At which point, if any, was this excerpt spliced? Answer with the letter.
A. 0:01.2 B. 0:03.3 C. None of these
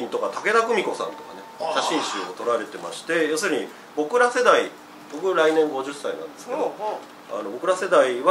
C